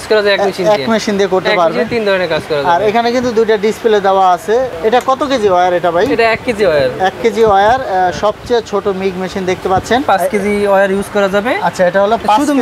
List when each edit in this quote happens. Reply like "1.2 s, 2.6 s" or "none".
4.7 s, 10.0 s